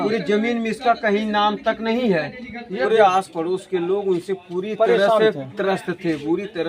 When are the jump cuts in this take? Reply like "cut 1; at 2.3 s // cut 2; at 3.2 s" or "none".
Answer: cut 1; at 2.9 s